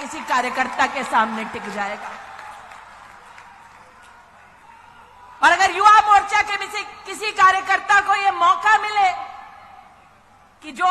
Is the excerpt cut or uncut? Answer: uncut